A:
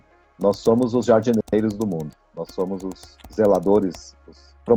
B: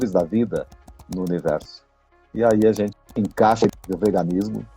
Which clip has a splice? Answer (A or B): B